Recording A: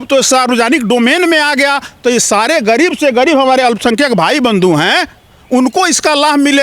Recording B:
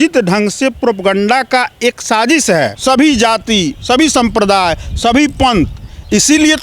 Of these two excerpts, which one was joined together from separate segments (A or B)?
B